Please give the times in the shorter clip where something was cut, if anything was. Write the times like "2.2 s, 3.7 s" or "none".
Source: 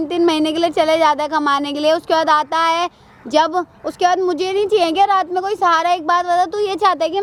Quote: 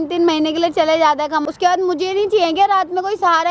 1.4 s